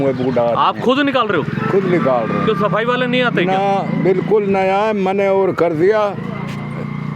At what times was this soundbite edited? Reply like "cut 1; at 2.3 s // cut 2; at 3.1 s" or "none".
none